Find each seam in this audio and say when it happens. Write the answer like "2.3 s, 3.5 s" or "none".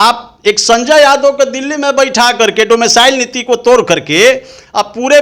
none